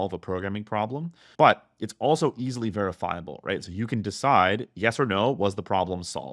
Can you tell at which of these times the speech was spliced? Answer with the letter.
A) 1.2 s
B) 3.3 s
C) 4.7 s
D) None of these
A